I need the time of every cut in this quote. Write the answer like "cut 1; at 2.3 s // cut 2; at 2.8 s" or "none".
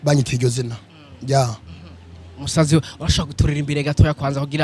none